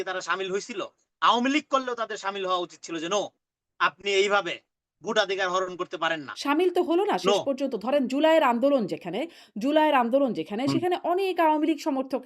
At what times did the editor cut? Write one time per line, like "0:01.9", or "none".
0:06.3